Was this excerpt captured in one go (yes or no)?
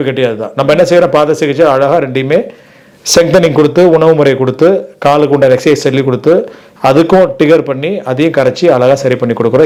yes